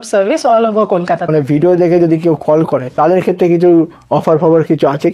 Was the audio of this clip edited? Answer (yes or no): yes